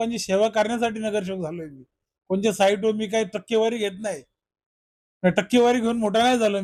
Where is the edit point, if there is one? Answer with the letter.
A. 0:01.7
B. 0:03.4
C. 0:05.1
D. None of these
D